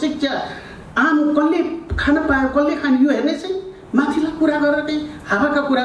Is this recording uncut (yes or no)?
yes